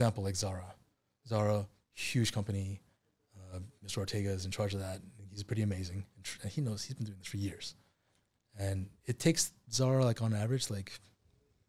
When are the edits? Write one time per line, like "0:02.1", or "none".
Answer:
none